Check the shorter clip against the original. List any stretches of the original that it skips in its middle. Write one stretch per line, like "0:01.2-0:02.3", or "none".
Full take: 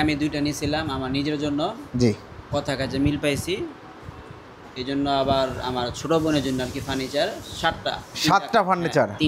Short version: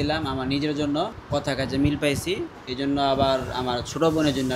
0:01.8-0:02.4
0:03.8-0:04.7